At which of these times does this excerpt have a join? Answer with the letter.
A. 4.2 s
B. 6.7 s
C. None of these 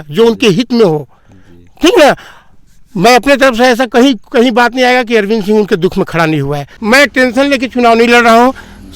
B